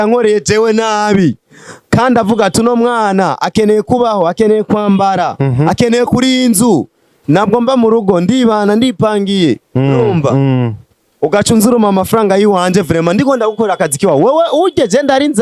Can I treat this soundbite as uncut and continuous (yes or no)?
yes